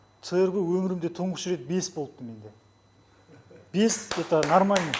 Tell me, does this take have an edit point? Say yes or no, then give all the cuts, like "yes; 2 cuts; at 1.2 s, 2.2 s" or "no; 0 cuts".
no; 0 cuts